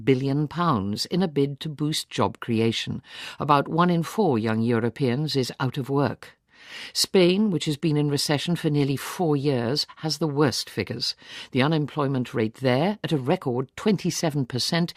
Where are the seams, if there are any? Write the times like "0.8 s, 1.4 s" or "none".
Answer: 9.3 s